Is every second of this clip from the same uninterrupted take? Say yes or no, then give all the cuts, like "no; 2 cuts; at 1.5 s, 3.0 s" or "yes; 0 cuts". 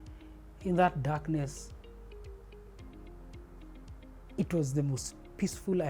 no; 2 cuts; at 2.1 s, 3.9 s